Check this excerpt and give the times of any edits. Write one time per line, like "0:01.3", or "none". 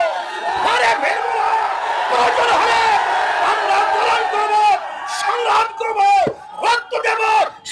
none